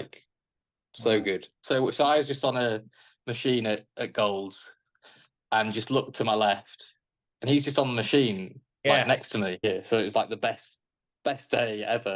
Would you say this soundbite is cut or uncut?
cut